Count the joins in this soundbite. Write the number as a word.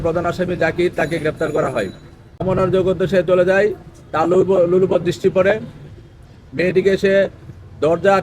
one